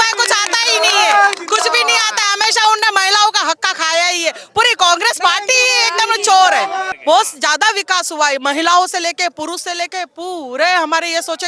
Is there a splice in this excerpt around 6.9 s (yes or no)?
yes